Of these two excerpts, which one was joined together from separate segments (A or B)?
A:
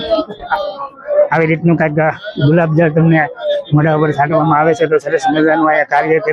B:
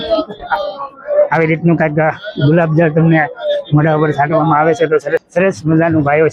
B